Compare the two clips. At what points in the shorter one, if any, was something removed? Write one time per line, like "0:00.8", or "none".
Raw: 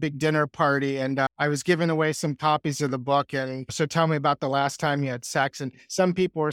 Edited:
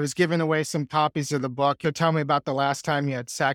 0:01.8